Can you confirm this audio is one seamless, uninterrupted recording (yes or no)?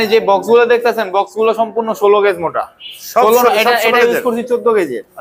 yes